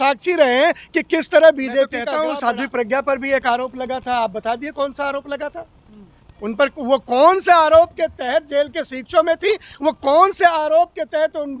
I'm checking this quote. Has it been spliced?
yes; 1 cut; at 2.1 s

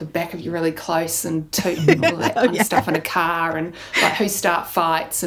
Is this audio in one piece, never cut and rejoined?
yes; 0 cuts

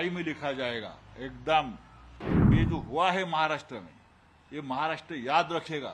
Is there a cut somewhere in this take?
yes; 1 cut; at 2.5 s

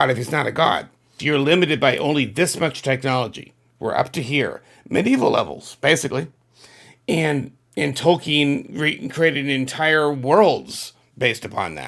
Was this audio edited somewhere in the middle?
yes; 1 cut; at 1.2 s

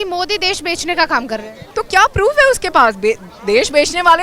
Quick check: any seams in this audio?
yes; 1 cut; at 1.6 s

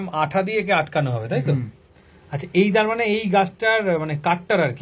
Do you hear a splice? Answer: no; 0 cuts

